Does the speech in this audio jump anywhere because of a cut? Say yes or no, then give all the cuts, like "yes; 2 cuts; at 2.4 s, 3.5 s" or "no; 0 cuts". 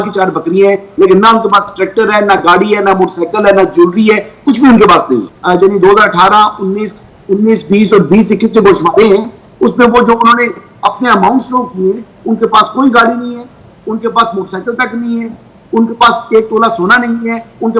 yes; 1 cut; at 5.3 s